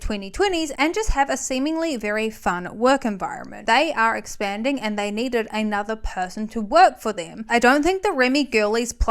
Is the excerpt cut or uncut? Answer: cut